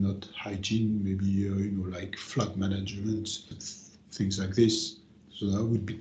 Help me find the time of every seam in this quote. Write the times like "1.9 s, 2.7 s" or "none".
2.2 s, 3.5 s